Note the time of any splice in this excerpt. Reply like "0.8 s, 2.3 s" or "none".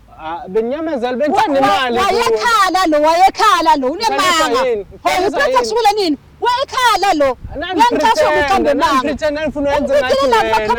none